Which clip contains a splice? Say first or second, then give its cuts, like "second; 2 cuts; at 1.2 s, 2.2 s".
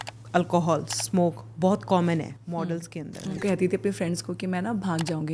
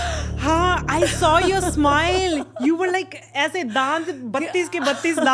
first; 1 cut; at 3.4 s